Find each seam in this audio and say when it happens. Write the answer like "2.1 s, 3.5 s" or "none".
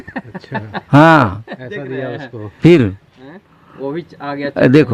none